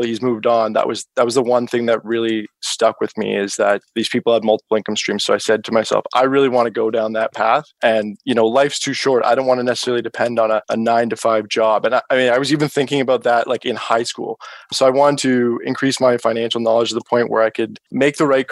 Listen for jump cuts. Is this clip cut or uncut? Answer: uncut